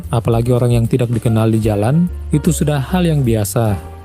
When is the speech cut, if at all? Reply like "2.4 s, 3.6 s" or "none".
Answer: none